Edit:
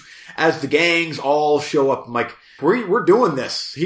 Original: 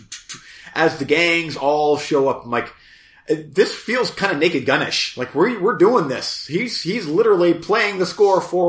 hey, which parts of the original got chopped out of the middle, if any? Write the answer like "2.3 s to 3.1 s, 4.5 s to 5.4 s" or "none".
2.8 s to 5.2 s